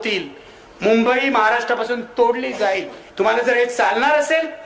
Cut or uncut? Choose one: cut